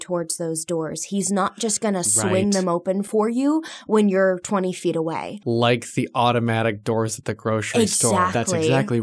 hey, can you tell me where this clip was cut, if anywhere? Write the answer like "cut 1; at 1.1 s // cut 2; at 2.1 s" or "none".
cut 1; at 3.1 s // cut 2; at 5.3 s